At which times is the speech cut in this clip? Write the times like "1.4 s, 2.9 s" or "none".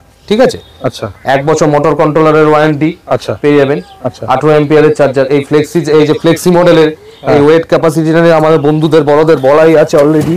none